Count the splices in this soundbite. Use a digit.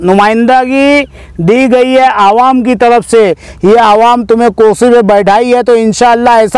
0